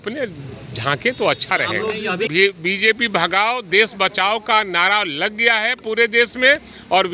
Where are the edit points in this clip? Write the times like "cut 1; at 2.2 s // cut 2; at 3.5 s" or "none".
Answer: cut 1; at 2.3 s

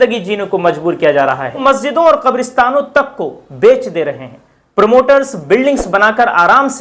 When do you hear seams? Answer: cut 1; at 1.6 s

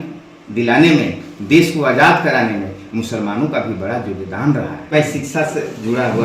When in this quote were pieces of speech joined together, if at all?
cut 1; at 4.9 s

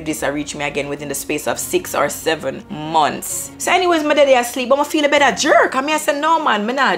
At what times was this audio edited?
cut 1; at 3.5 s

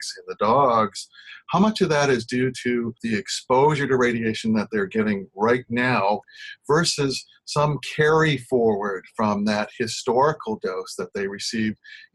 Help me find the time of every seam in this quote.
cut 1; at 3.0 s // cut 2; at 6.4 s

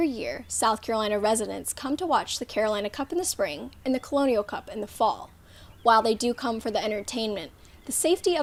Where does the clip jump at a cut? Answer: none

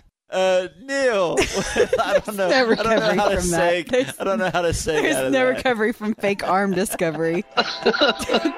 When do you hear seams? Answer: none

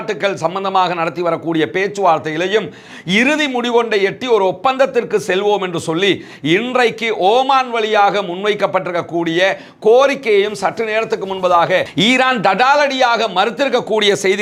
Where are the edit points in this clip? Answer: none

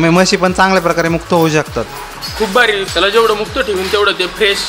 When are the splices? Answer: cut 1; at 2.9 s

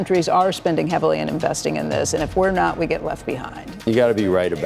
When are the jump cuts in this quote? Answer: cut 1; at 3.8 s

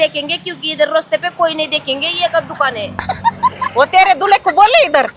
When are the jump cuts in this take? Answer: none

